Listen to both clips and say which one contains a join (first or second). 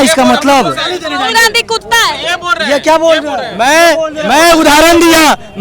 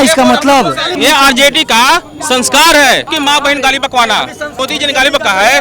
second